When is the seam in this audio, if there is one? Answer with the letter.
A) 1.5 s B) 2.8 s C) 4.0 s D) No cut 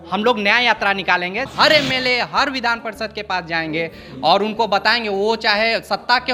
A